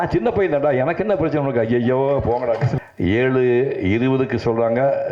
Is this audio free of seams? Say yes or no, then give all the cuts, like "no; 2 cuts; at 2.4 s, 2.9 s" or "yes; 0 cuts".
no; 1 cut; at 2.7 s